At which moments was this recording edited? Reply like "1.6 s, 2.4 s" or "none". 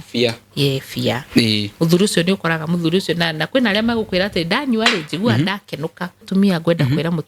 6.2 s